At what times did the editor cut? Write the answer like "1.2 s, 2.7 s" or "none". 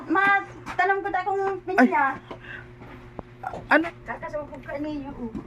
3.8 s